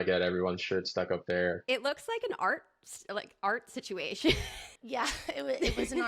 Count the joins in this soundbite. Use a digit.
2